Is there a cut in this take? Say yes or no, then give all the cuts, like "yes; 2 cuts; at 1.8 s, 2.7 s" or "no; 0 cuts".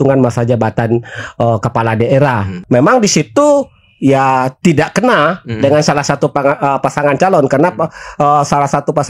yes; 1 cut; at 2.5 s